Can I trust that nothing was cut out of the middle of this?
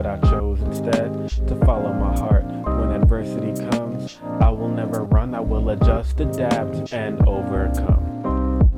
yes; 0 cuts

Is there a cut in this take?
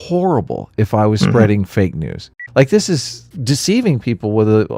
yes; 2 cuts; at 2.3 s, 3.3 s

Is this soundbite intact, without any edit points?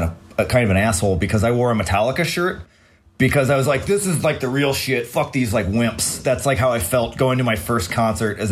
yes; 0 cuts

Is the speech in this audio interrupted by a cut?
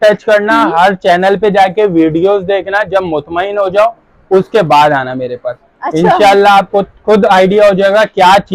no; 0 cuts

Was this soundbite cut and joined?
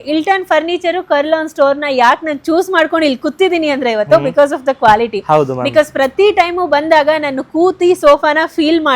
no; 0 cuts

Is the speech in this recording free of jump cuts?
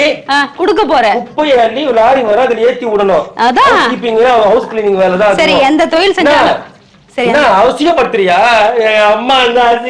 yes; 0 cuts

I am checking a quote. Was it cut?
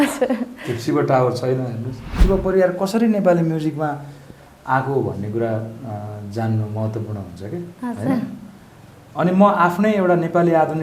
yes; 1 cut; at 2.2 s

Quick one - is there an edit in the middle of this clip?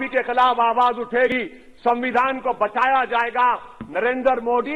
yes; 1 cut; at 1.3 s

